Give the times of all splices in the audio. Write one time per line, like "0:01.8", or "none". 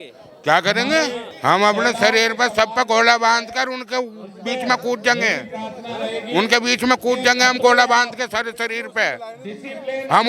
0:01.3